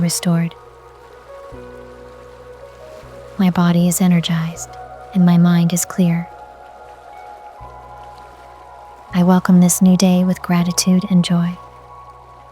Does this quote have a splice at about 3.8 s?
no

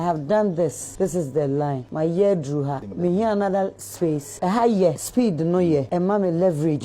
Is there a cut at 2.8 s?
yes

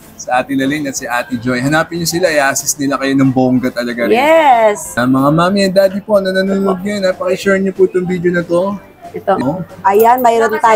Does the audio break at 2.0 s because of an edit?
no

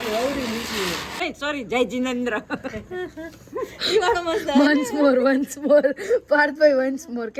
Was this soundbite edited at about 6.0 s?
no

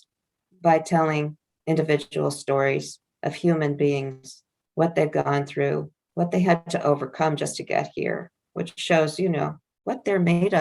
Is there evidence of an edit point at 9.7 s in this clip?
yes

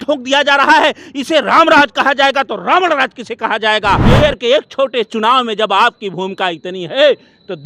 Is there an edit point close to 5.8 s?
no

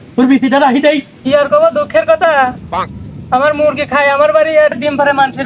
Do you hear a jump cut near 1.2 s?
yes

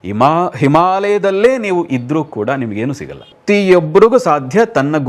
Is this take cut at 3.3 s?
yes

